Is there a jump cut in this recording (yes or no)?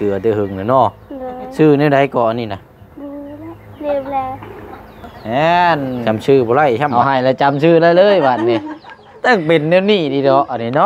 yes